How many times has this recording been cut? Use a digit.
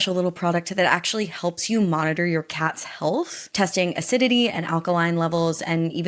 0